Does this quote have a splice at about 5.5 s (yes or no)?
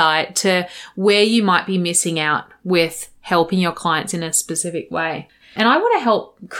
yes